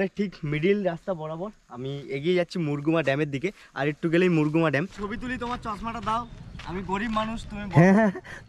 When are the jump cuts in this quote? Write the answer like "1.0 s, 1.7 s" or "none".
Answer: 4.9 s